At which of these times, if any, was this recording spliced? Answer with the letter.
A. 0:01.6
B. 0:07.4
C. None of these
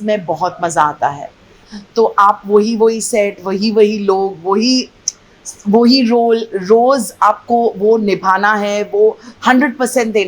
A